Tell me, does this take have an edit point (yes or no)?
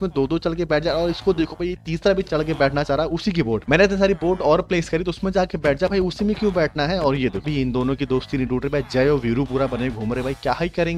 yes